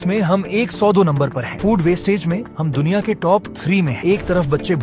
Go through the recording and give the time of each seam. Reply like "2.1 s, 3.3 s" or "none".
none